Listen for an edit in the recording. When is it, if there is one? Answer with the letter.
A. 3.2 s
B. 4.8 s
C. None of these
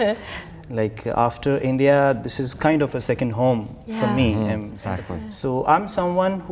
B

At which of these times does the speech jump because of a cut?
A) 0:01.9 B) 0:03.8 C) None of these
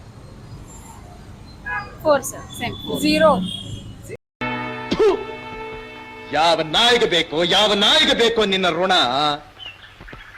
C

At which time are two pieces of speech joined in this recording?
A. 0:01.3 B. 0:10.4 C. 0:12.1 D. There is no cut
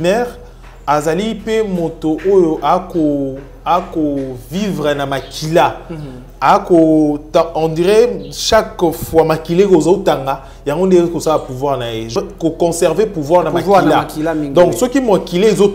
C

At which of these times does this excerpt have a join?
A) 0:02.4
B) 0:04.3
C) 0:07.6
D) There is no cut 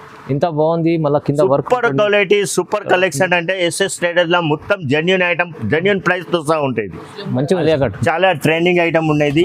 C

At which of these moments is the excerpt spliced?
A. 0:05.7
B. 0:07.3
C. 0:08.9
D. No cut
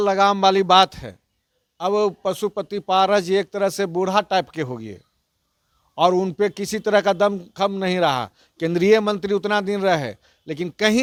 D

